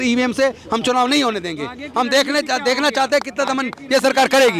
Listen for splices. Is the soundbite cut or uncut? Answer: uncut